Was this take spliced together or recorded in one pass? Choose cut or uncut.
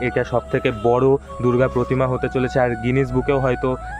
uncut